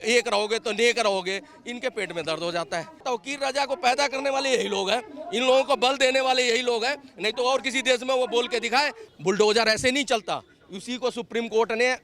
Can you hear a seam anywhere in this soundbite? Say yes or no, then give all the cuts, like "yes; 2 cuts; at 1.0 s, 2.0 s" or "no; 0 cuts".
yes; 2 cuts; at 3.0 s, 9.0 s